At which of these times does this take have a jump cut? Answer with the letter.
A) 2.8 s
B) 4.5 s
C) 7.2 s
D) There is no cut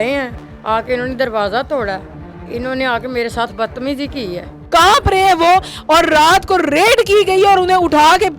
B